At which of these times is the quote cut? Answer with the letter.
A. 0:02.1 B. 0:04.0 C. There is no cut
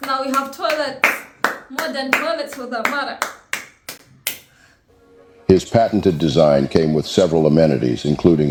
C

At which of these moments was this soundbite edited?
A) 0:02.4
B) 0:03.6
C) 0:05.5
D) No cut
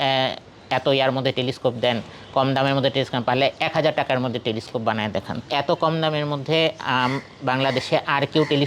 C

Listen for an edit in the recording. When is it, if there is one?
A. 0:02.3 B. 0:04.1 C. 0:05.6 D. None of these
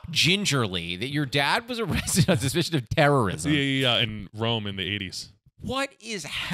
B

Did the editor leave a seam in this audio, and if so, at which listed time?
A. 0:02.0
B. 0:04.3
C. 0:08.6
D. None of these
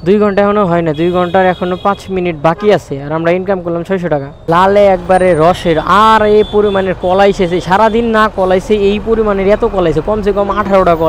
B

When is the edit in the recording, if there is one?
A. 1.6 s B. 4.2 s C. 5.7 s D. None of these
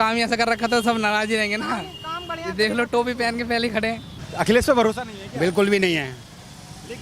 B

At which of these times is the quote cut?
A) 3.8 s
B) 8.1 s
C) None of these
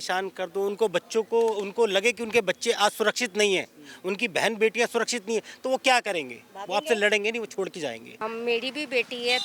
B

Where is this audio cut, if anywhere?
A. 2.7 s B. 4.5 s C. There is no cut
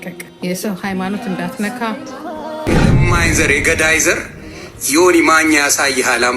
A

